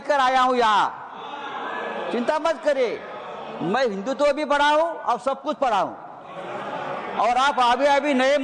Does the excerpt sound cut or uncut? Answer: uncut